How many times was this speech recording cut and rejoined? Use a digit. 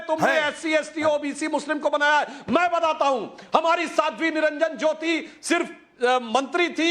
1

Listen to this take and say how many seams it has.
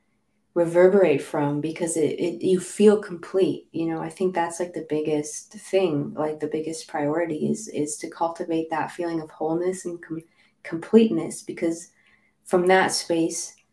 0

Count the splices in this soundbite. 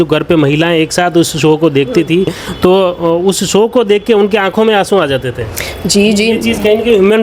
0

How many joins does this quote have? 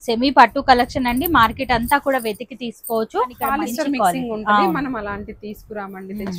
1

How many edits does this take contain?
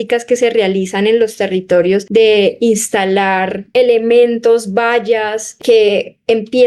3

